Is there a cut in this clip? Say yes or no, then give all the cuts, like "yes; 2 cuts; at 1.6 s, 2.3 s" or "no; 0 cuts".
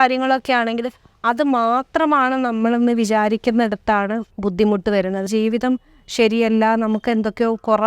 yes; 2 cuts; at 4.3 s, 5.3 s